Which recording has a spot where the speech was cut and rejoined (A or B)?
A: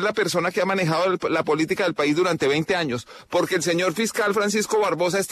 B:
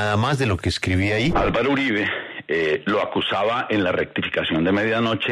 B